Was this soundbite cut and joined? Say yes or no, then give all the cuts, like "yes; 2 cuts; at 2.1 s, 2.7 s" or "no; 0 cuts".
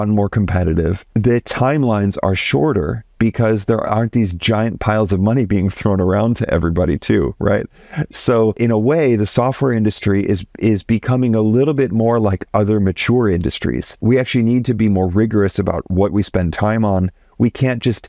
yes; 3 cuts; at 1.0 s, 8.6 s, 13.9 s